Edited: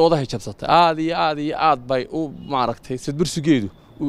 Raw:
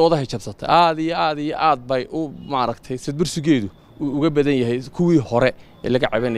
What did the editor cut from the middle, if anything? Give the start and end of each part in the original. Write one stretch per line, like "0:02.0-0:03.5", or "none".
none